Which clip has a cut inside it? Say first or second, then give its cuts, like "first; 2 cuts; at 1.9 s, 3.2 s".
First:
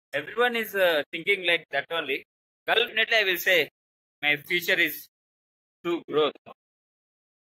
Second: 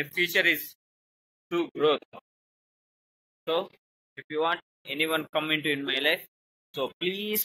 first; 1 cut; at 2.9 s